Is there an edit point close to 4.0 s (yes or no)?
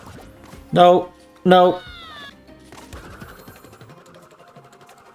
no